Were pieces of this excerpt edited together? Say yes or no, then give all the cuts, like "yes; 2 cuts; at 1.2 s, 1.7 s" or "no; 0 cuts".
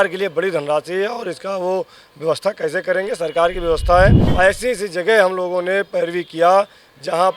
yes; 1 cut; at 4.2 s